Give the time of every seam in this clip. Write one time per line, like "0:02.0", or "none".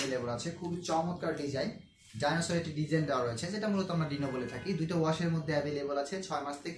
none